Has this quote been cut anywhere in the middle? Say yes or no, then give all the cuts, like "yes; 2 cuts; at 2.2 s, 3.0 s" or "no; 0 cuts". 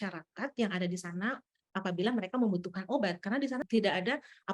yes; 1 cut; at 3.6 s